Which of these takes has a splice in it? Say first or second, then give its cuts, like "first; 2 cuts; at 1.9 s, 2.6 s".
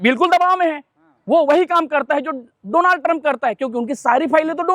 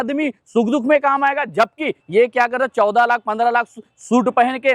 second; 1 cut; at 2.0 s